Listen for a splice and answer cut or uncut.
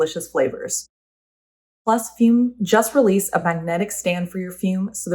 cut